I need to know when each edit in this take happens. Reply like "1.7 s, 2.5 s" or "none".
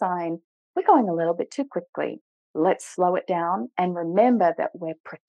none